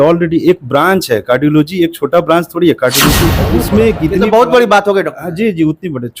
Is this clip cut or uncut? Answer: cut